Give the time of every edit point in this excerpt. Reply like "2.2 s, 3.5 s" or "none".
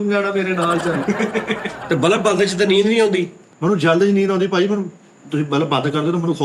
1.8 s